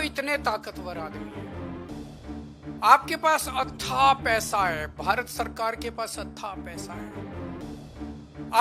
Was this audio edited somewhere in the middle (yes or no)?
yes